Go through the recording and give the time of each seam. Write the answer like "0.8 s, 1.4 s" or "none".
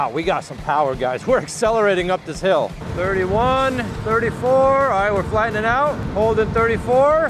2.8 s